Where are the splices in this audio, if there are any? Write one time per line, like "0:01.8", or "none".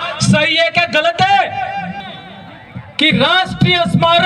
0:02.1

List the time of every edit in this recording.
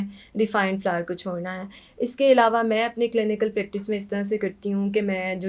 none

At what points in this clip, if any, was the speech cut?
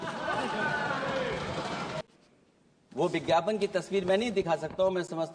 0:02.0

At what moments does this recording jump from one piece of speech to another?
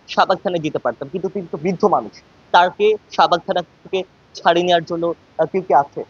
none

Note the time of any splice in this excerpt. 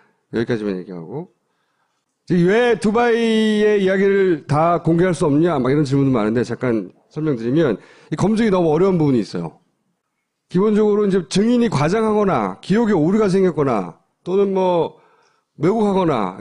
0:07.9

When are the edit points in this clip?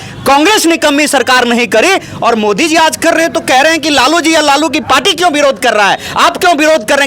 none

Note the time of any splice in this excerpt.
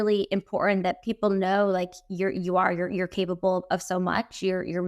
0:01.0

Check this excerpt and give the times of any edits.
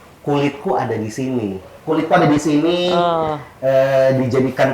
0:01.7

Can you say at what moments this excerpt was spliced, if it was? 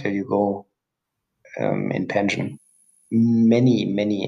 none

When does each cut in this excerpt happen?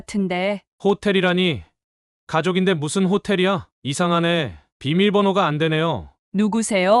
0:03.7
0:06.1

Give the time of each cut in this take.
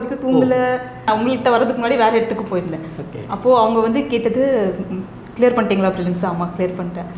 0:01.1

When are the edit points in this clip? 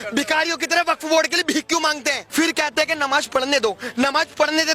0:02.2

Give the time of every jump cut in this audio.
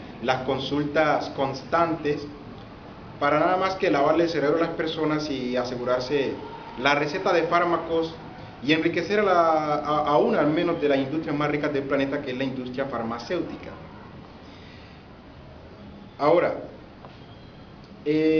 0:15.8

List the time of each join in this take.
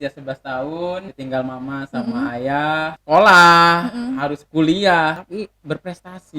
0:01.1
0:03.0
0:05.2

